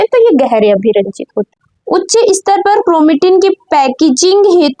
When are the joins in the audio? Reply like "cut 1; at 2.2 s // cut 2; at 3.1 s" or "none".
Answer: cut 1; at 1.5 s